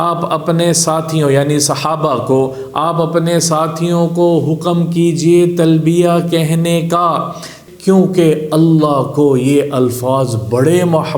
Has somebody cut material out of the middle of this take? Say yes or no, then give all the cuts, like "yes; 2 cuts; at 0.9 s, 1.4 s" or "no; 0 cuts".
yes; 1 cut; at 7.6 s